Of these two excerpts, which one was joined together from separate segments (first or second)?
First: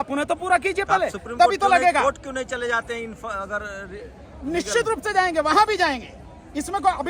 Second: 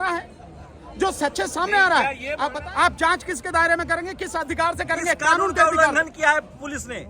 second